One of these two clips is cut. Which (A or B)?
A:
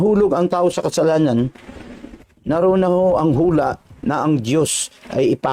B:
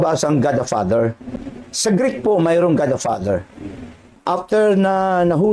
B